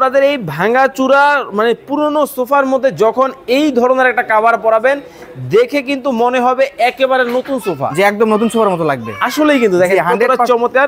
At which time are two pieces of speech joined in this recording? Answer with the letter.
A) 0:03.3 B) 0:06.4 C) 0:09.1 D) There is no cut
D